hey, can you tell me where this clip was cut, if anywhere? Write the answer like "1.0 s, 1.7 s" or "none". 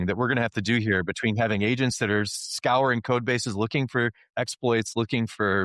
4.3 s